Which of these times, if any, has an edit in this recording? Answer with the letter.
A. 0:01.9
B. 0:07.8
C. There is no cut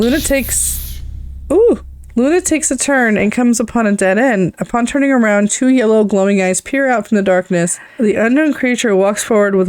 B